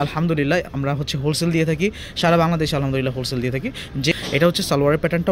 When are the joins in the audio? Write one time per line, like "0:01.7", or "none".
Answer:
0:04.1